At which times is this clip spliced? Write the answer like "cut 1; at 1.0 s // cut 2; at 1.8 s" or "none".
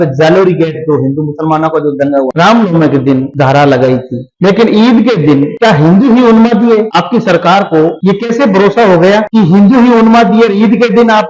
cut 1; at 2.3 s // cut 2; at 3.3 s // cut 3; at 4.2 s // cut 4; at 5.5 s // cut 5; at 6.9 s // cut 6; at 8.0 s // cut 7; at 9.3 s